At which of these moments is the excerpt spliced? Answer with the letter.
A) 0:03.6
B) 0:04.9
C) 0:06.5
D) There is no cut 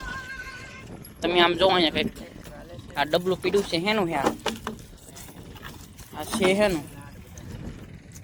D